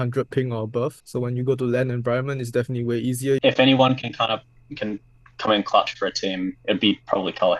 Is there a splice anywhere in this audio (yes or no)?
yes